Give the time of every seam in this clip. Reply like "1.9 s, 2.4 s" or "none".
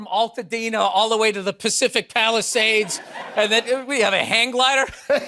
none